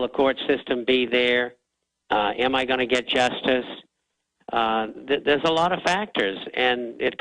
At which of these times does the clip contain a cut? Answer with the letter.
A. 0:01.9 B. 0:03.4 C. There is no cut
B